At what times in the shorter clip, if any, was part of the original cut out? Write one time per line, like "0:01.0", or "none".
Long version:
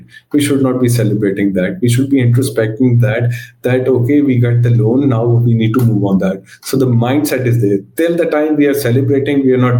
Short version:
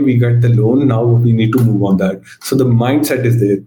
none